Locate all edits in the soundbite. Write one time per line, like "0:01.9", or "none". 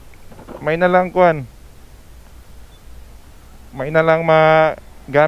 none